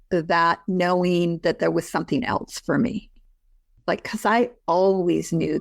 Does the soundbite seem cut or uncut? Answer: cut